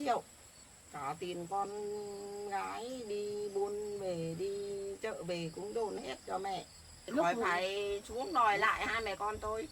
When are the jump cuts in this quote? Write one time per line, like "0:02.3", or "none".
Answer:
0:07.1